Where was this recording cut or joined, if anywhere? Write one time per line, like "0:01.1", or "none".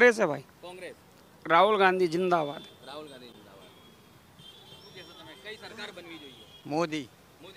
none